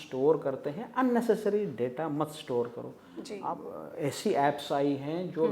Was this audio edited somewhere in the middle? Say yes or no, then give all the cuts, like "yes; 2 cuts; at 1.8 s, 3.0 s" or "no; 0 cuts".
yes; 1 cut; at 3.3 s